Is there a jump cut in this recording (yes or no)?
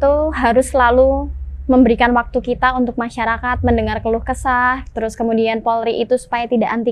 no